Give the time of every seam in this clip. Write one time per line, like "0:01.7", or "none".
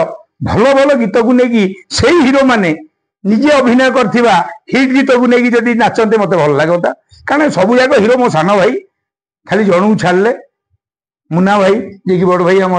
none